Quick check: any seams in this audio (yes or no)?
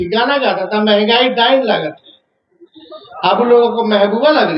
no